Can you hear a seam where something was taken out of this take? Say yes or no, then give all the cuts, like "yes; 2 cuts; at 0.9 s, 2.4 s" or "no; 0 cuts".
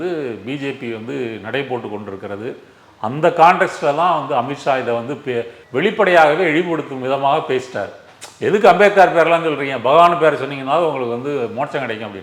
yes; 1 cut; at 5.6 s